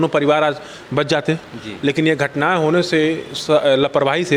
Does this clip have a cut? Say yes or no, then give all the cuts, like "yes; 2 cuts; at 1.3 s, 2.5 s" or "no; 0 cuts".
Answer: no; 0 cuts